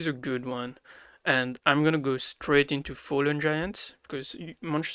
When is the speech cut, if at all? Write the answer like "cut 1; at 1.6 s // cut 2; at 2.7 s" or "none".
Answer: none